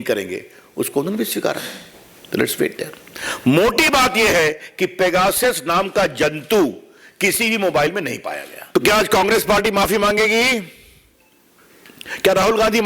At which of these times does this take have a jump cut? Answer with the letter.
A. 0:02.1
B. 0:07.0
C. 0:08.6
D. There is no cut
C